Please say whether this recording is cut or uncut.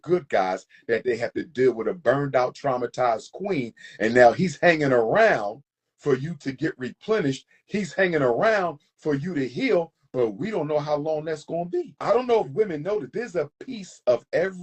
cut